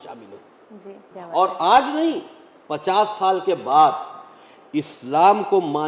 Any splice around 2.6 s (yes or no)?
no